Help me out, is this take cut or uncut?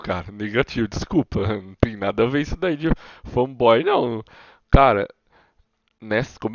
uncut